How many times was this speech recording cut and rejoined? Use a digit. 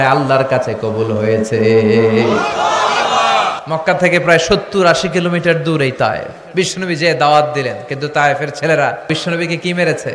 3